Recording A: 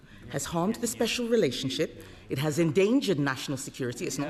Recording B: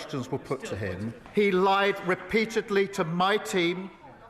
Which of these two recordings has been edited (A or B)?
B